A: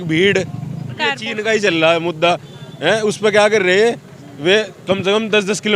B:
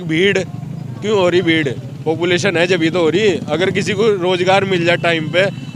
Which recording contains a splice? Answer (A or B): A